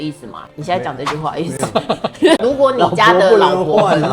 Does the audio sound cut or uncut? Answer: cut